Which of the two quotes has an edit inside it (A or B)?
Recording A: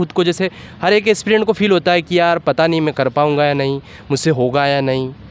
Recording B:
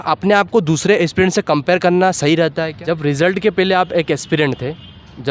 B